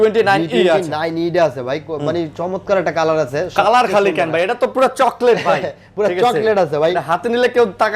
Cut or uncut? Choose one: uncut